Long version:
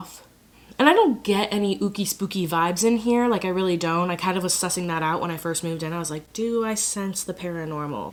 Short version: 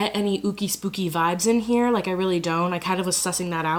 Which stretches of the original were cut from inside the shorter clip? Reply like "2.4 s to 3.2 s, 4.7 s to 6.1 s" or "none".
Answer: none